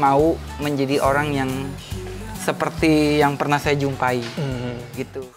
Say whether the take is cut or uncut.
uncut